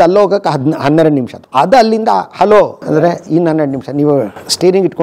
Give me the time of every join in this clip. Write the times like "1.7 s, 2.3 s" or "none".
1.4 s, 2.9 s